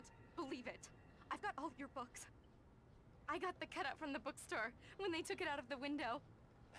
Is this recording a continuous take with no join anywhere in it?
yes; 0 cuts

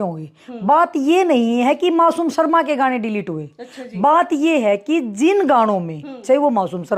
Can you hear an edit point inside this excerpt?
no; 0 cuts

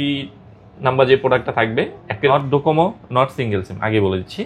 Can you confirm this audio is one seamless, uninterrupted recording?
no; 1 cut; at 2.3 s

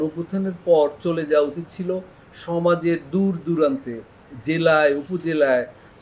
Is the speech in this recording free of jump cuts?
yes; 0 cuts

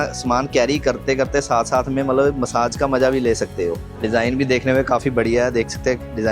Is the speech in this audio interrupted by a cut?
no; 0 cuts

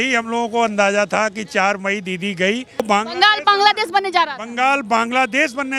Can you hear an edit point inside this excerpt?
yes; 1 cut; at 2.8 s

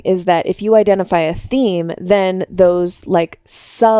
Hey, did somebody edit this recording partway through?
no; 0 cuts

